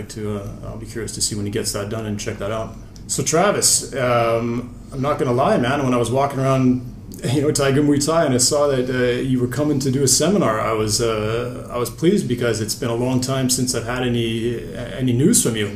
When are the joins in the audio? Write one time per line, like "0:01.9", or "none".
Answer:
0:11.4